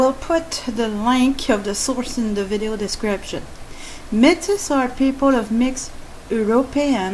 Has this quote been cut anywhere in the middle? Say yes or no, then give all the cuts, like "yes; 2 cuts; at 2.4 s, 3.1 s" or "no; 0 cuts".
yes; 1 cut; at 1.9 s